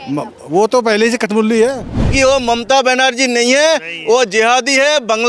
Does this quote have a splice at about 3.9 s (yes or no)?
no